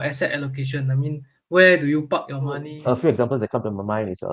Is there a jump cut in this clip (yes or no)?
yes